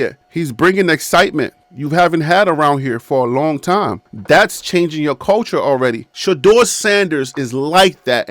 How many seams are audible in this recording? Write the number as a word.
one